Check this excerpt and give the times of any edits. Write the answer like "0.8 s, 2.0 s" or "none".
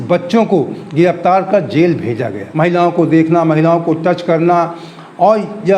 2.4 s